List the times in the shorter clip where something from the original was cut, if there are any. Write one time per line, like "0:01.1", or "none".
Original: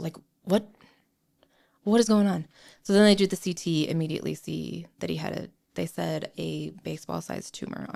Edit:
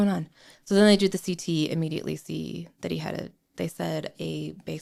none